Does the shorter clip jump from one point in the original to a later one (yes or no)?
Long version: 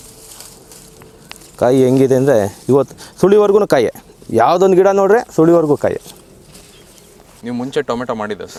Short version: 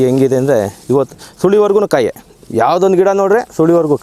no